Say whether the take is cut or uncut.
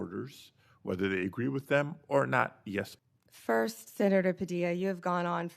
cut